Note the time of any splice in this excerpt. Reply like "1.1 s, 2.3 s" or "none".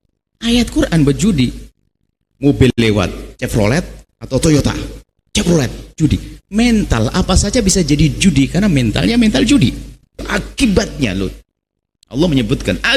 10.3 s

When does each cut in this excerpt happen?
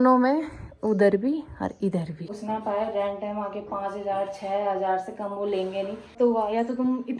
2.3 s, 6.1 s

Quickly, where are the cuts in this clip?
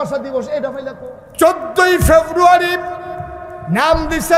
1.1 s

